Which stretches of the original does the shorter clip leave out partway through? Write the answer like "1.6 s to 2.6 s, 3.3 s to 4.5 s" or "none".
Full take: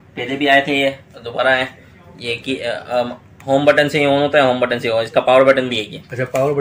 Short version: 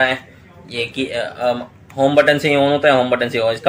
none